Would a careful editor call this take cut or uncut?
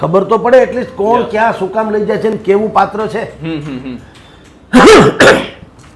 uncut